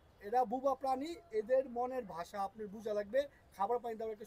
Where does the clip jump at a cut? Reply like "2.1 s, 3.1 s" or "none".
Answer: none